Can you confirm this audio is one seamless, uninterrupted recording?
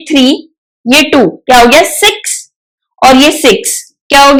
yes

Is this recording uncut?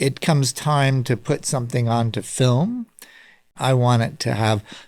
no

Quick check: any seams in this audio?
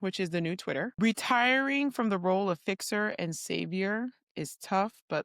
yes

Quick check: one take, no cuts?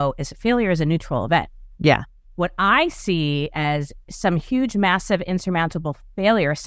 no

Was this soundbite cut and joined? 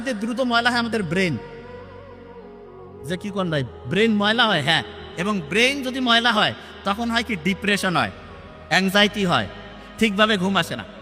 no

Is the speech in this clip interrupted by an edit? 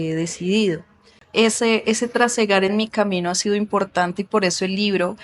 yes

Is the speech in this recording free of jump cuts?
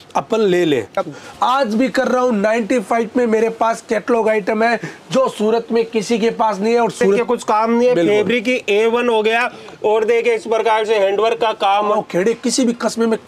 no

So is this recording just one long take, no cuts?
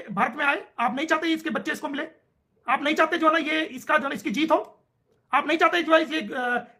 yes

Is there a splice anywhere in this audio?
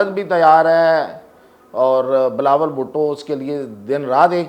no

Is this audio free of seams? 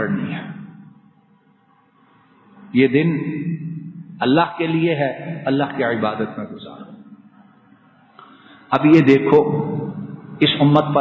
yes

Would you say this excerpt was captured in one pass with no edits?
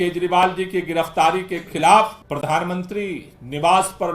no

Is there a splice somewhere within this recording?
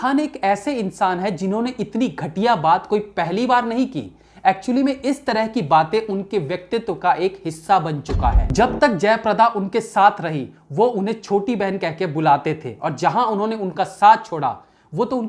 no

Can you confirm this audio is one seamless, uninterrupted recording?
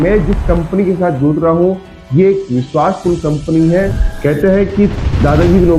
no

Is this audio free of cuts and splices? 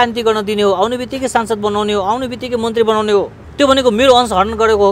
no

